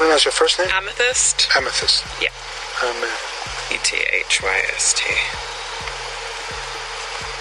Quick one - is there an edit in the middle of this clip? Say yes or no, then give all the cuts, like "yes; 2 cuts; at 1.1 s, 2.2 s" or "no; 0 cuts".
no; 0 cuts